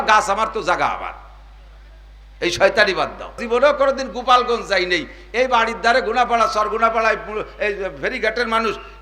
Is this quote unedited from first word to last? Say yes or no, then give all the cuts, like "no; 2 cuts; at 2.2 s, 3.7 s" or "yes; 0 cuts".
no; 1 cut; at 3.4 s